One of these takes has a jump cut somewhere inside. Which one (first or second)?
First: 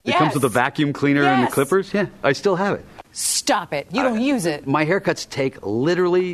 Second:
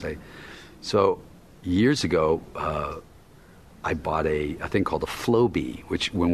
first